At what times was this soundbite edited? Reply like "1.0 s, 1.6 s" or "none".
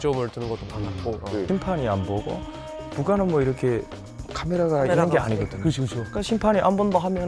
1.5 s